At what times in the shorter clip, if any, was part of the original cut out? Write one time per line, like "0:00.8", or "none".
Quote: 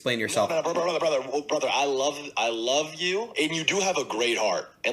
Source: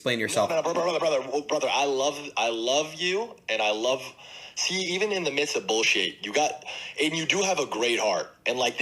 0:03.3